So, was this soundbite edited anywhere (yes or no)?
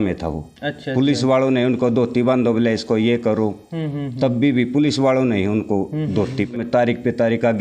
yes